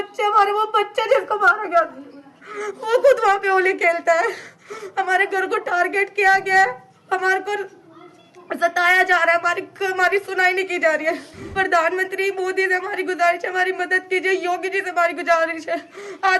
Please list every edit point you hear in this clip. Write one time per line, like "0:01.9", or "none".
0:11.4